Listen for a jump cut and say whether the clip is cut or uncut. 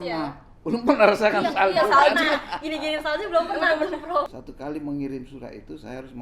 cut